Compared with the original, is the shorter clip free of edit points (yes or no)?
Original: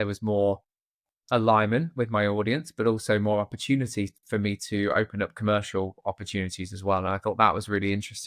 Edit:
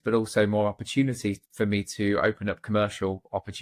yes